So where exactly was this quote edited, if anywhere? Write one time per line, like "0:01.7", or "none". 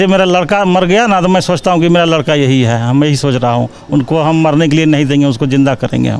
none